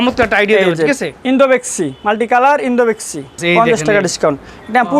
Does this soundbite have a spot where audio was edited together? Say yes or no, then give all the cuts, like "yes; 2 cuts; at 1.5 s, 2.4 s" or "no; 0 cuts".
yes; 1 cut; at 3.4 s